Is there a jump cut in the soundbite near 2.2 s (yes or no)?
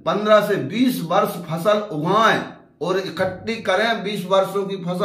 no